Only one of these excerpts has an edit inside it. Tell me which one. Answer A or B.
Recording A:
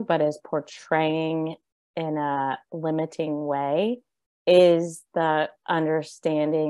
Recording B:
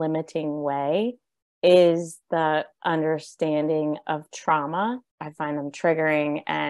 B